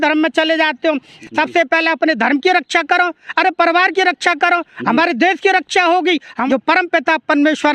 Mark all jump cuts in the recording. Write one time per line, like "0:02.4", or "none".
0:01.2
0:06.4